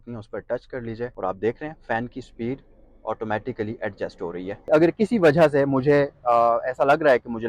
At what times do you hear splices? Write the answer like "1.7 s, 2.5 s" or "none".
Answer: 1.1 s, 4.7 s